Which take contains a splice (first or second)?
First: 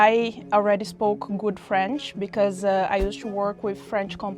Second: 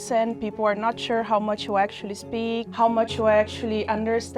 second